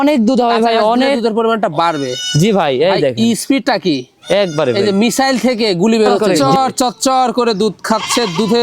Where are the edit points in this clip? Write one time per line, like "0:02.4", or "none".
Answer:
0:06.2